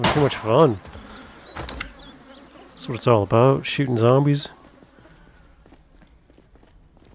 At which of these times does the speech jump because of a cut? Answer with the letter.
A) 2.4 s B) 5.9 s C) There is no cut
C